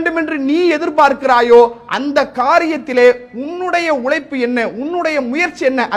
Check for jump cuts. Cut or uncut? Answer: uncut